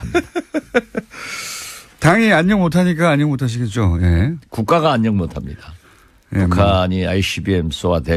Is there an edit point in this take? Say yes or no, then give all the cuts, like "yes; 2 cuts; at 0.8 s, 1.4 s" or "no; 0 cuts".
no; 0 cuts